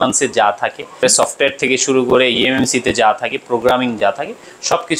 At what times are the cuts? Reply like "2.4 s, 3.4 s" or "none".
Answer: 1.0 s